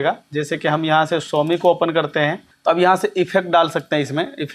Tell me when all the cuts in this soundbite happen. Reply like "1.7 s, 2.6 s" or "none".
2.5 s